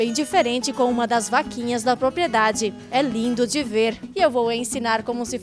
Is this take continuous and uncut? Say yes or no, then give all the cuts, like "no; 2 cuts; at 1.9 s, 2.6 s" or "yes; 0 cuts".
no; 1 cut; at 4.0 s